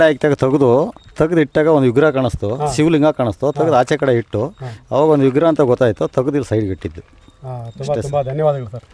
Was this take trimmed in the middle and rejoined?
no; 0 cuts

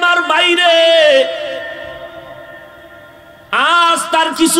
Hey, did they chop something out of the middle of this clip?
no; 0 cuts

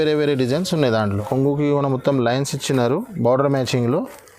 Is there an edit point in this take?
yes; 1 cut; at 1.1 s

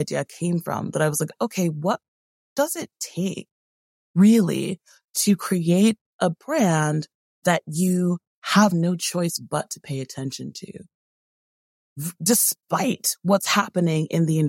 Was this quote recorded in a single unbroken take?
yes; 0 cuts

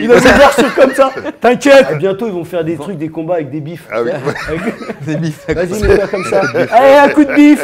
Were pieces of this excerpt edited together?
yes; 1 cut; at 1.9 s

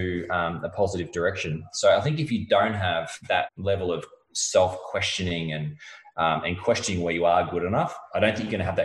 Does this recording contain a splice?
yes; 2 cuts; at 1.7 s, 3.5 s

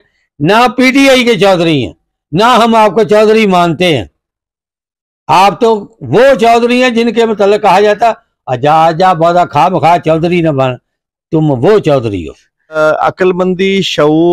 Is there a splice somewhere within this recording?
yes; 1 cut; at 12.8 s

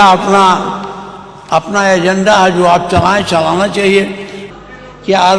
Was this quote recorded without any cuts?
no; 1 cut; at 4.3 s

